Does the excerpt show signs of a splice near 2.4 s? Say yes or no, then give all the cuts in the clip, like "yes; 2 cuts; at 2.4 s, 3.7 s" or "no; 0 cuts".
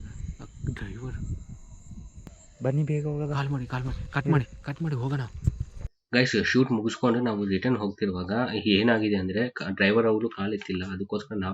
yes; 1 cut; at 2.4 s